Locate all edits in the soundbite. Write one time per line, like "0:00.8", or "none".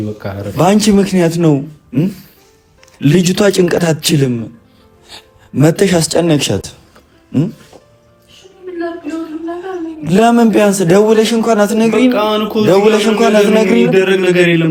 none